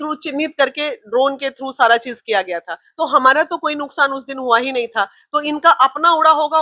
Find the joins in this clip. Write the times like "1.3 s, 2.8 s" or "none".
none